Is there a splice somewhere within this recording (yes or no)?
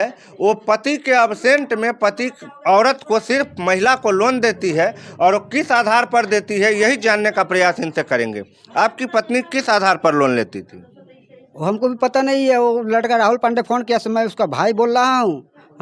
no